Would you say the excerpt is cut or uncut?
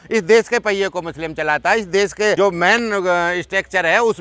cut